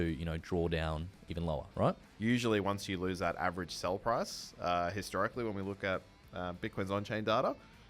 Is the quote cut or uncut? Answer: cut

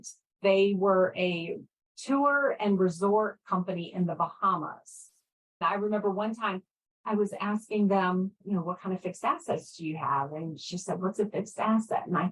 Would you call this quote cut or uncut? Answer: cut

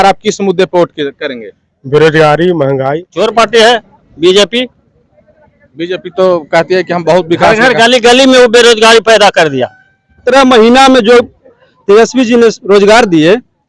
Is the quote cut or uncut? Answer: cut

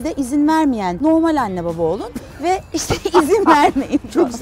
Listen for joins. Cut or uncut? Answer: cut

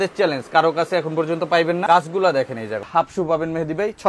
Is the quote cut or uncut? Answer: cut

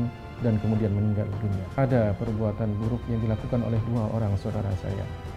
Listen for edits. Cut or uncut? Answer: cut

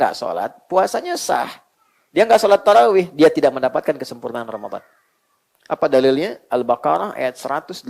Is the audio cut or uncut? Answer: uncut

